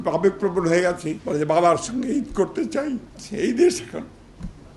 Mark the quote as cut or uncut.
cut